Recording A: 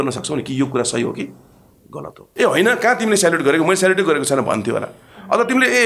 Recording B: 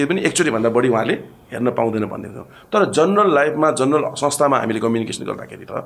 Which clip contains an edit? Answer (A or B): A